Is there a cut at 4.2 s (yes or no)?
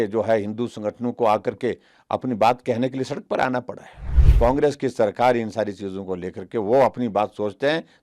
yes